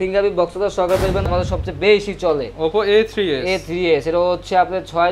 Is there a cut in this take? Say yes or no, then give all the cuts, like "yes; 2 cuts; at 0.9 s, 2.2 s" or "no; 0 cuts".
yes; 1 cut; at 1.3 s